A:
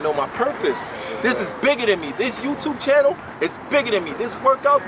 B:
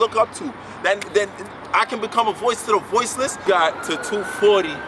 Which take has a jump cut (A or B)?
B